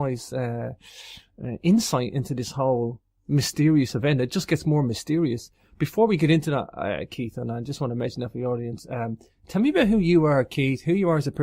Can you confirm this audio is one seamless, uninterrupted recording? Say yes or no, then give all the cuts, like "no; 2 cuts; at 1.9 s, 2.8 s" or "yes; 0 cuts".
no; 1 cut; at 7.0 s